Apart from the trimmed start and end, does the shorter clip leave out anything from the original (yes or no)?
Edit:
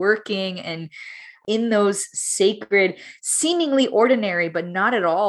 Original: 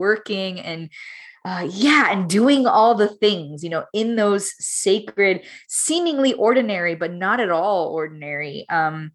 yes